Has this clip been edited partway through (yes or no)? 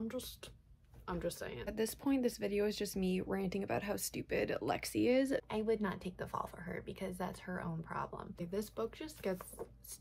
yes